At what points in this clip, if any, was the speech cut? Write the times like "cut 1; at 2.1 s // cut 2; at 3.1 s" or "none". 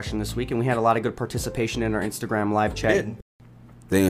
cut 1; at 3.1 s